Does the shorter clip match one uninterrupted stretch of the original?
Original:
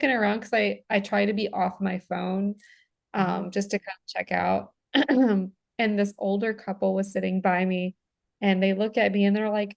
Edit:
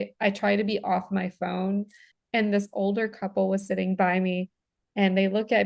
no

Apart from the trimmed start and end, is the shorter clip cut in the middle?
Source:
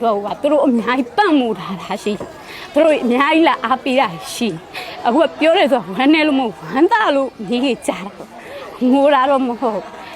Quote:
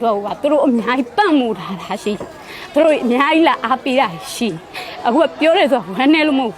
no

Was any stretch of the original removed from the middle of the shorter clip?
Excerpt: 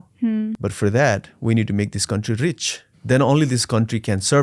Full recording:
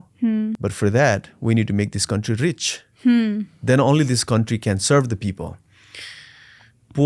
yes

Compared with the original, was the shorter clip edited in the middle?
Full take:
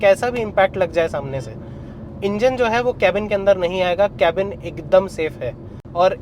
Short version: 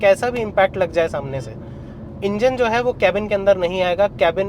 no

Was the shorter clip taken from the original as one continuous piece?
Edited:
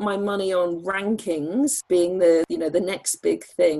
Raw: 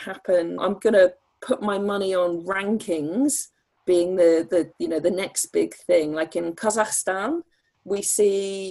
no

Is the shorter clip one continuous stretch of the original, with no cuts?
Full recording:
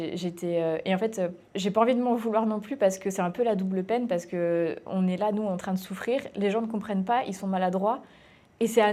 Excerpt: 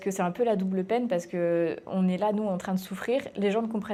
yes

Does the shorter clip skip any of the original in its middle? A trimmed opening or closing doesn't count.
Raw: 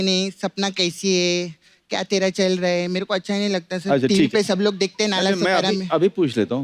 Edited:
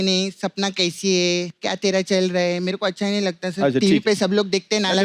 yes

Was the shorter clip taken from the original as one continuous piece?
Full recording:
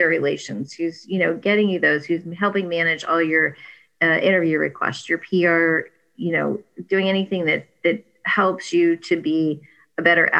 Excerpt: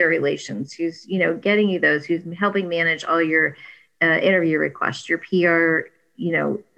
yes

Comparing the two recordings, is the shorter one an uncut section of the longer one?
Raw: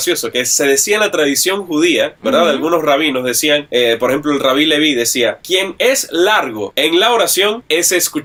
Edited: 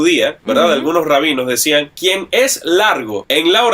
no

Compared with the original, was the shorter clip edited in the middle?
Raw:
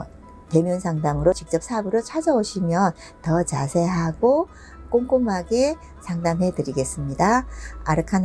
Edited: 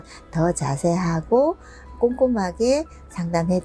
no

